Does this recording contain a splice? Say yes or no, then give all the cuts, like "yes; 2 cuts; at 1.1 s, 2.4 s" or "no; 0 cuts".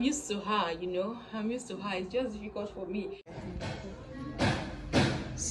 yes; 1 cut; at 3.4 s